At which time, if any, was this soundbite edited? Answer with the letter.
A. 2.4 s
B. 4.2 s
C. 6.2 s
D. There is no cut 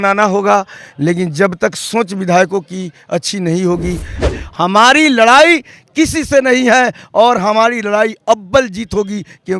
B